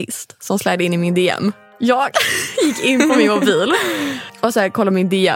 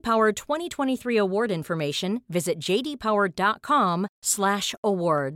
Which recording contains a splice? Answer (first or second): first